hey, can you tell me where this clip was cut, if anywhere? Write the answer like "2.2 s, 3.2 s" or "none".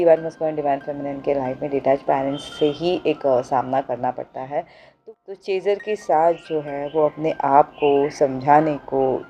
4.8 s